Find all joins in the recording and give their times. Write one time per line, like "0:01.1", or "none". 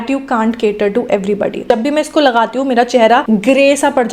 0:01.6
0:03.2